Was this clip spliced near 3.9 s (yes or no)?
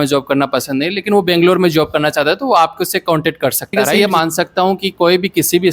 yes